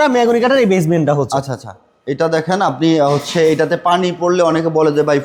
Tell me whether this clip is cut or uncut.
uncut